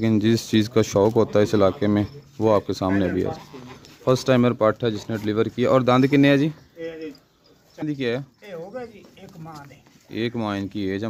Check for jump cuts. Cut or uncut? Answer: cut